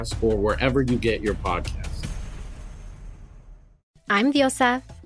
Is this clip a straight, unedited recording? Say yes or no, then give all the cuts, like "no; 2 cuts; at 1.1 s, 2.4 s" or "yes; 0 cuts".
no; 1 cut; at 3.9 s